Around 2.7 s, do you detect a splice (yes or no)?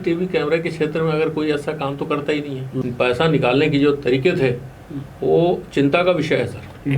yes